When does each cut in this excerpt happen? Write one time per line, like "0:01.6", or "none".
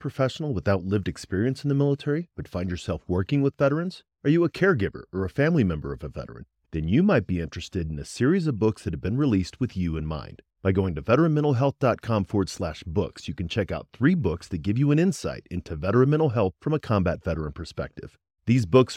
none